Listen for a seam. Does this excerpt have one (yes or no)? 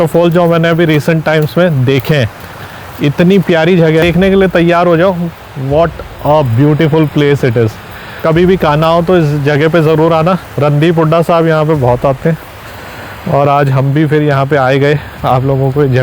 no